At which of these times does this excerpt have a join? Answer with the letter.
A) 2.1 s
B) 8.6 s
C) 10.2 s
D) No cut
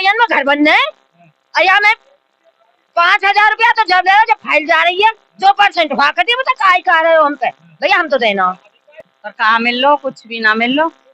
B